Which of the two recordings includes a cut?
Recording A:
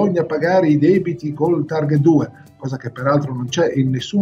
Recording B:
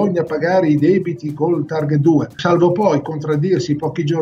B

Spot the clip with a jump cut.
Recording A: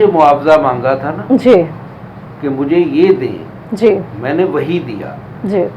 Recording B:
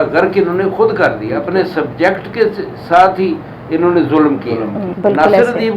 B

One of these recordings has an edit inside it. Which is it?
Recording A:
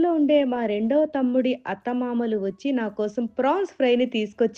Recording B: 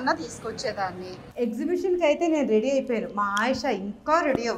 B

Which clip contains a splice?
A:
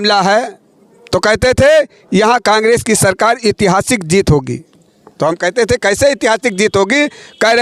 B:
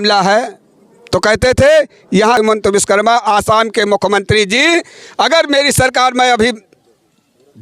B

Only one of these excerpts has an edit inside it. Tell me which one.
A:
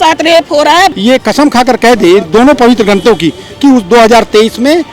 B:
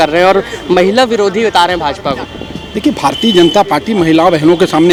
A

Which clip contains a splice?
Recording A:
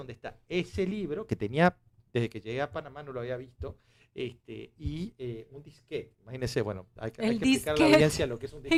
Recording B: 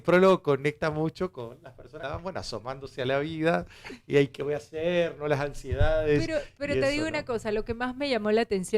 B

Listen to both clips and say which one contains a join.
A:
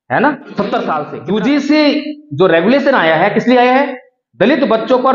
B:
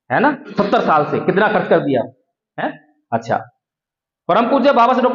A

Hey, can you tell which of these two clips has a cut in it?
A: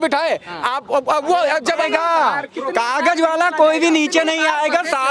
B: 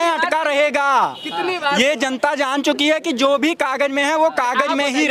A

